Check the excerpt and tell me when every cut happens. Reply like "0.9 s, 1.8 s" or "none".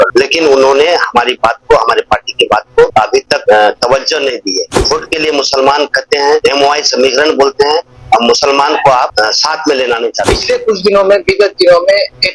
4.7 s, 10.2 s